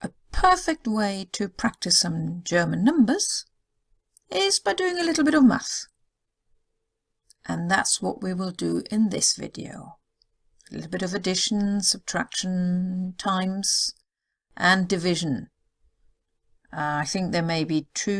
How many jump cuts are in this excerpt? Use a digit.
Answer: 0